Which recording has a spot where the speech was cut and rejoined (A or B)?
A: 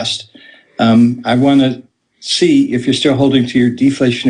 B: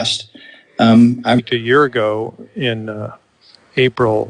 A